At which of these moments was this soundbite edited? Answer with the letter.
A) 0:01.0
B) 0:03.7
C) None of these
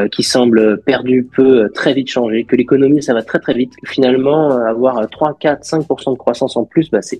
C